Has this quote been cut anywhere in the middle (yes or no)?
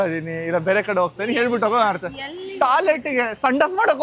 no